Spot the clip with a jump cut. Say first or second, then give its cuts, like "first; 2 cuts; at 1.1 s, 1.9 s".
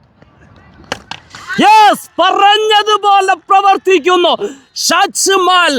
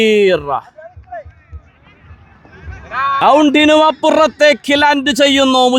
second; 1 cut; at 3.2 s